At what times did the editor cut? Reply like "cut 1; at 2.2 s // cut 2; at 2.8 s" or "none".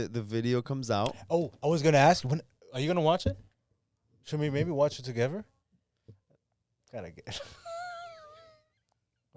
none